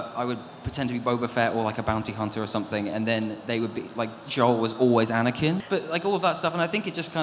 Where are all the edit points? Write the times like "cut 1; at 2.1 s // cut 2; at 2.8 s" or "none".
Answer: cut 1; at 5.6 s